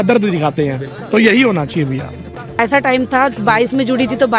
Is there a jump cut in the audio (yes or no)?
yes